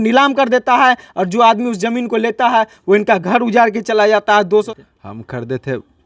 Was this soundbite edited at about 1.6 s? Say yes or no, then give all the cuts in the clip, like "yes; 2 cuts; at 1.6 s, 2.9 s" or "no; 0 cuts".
no; 1 cut; at 4.7 s